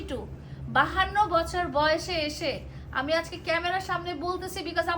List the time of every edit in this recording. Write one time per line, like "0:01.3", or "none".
none

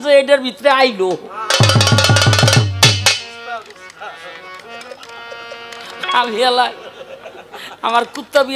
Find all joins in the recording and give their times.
none

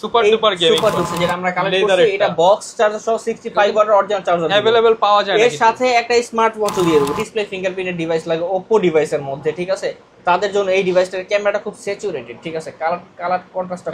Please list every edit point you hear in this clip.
0:01.1
0:07.1

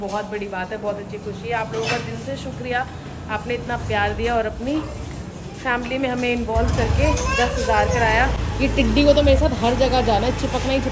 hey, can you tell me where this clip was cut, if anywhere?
none

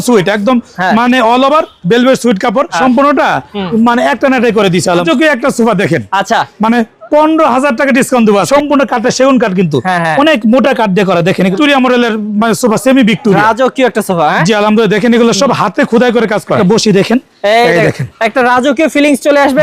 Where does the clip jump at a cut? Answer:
0:02.7
0:05.0
0:08.5
0:11.5
0:16.6

